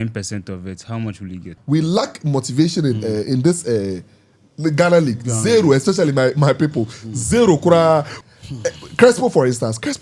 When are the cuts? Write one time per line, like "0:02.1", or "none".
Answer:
0:01.4
0:08.1